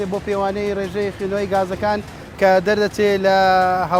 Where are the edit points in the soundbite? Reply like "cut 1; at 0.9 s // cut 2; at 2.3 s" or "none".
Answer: none